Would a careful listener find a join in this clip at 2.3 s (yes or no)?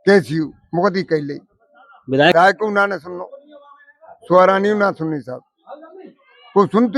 yes